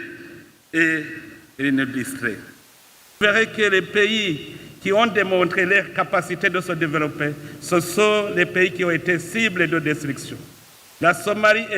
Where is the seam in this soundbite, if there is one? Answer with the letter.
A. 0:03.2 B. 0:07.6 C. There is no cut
A